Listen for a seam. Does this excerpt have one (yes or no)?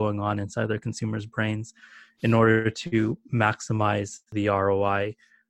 yes